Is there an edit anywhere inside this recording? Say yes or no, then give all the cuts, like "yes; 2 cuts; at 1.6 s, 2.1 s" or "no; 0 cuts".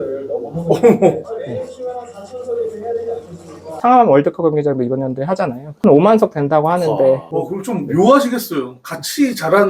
yes; 1 cut; at 3.7 s